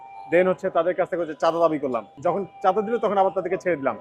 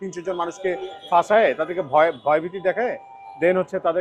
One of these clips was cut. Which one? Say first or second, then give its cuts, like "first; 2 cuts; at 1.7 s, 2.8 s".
first; 1 cut; at 2.1 s